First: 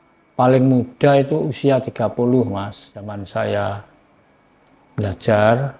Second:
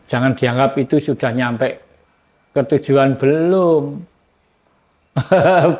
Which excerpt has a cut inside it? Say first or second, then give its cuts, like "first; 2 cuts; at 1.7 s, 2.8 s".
first; 1 cut; at 3.2 s